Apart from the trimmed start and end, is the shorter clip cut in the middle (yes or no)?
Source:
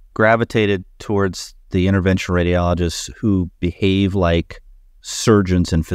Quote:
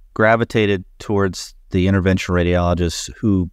no